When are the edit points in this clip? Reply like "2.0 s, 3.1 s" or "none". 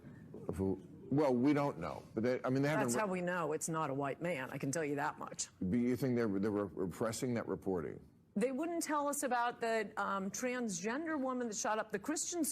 1.6 s